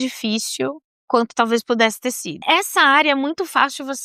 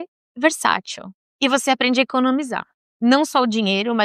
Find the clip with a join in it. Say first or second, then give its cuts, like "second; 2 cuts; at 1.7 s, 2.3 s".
first; 1 cut; at 2.3 s